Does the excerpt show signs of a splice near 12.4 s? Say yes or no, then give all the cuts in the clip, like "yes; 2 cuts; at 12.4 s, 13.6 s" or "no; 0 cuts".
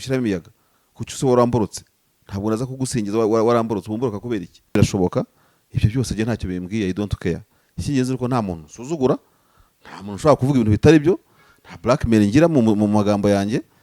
no; 1 cut; at 4.8 s